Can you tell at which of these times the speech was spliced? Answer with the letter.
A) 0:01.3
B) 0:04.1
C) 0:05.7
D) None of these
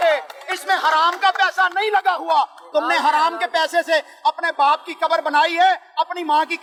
D